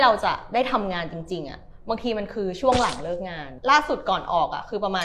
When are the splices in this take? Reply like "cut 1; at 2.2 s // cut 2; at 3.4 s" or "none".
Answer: cut 1; at 3.5 s